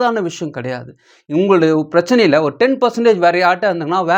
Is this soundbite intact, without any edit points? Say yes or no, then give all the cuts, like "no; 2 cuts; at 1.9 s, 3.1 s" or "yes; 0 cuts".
yes; 0 cuts